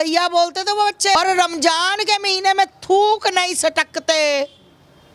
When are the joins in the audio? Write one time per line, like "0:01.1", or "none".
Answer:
0:01.2

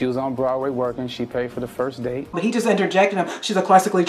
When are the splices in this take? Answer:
0:02.4

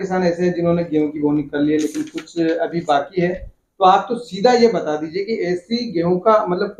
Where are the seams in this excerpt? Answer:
none

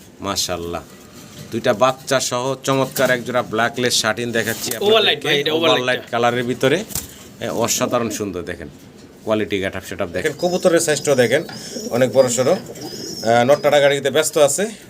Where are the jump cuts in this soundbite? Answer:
0:10.2

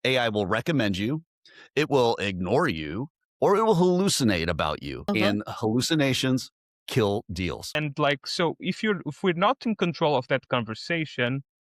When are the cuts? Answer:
0:04.9
0:07.8

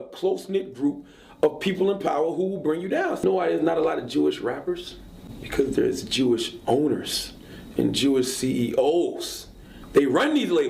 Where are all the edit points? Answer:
0:03.2

